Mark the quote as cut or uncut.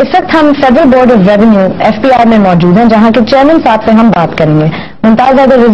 cut